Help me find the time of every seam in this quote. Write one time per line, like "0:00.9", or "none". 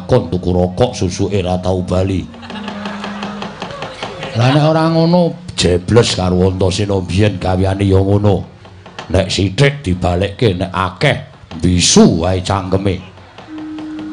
none